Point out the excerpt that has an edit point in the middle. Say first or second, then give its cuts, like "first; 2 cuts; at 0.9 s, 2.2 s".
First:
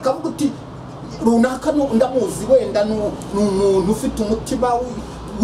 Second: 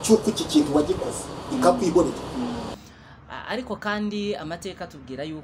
second; 1 cut; at 2.7 s